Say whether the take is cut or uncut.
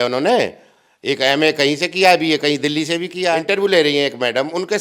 cut